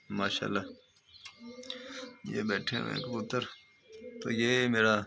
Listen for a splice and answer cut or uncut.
uncut